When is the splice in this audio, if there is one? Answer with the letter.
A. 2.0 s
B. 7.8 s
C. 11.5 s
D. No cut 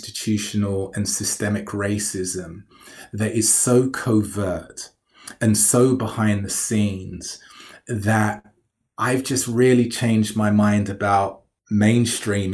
C